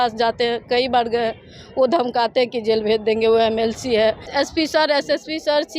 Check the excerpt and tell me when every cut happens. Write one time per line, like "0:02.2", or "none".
0:04.3